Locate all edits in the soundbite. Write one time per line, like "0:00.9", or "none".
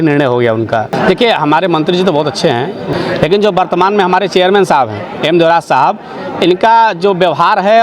0:00.9
0:02.8